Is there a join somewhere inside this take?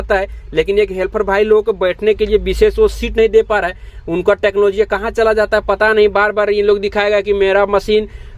no; 0 cuts

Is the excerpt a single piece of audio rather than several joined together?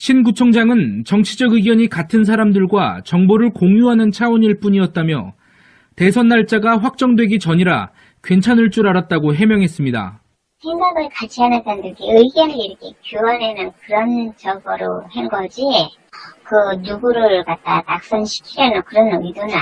no; 1 cut; at 9.3 s

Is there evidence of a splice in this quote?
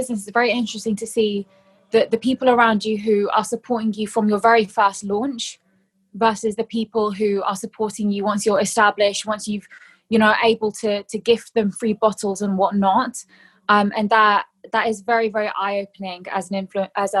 no; 0 cuts

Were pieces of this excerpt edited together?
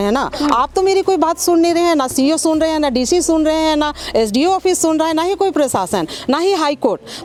no; 0 cuts

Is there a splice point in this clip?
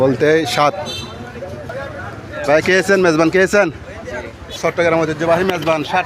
yes; 1 cut; at 1.6 s

